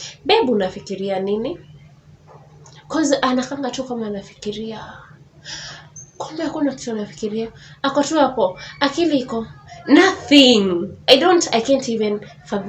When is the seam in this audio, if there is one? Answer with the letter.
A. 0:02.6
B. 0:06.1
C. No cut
C